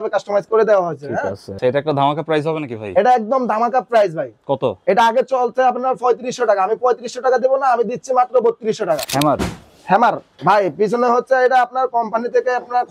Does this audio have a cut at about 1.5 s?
yes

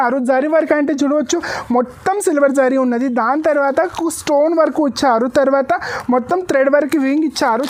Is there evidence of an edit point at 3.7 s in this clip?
no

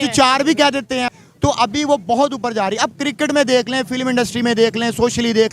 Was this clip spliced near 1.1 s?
yes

